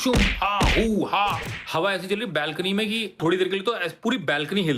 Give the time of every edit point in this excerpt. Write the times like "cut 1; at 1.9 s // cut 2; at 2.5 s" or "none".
cut 1; at 3.2 s

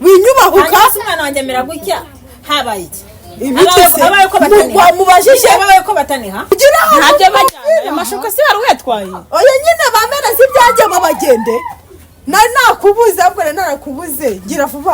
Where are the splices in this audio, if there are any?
cut 1; at 6.5 s

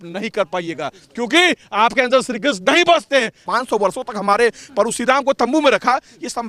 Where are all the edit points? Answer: cut 1; at 3.5 s

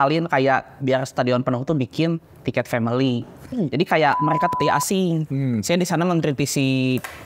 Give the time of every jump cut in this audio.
cut 1; at 4.6 s

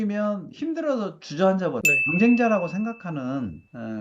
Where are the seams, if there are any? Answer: cut 1; at 1.8 s

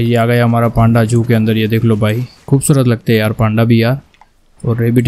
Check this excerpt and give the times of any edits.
cut 1; at 2.4 s

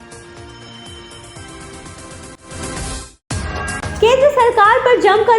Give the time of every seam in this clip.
none

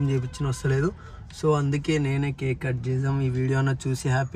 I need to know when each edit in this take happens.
none

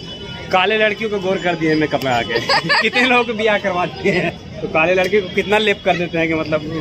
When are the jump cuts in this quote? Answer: cut 1; at 4.4 s

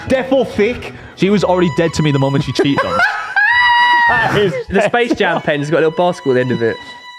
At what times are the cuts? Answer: cut 1; at 1.1 s // cut 2; at 4.7 s

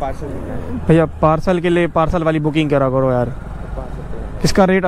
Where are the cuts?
none

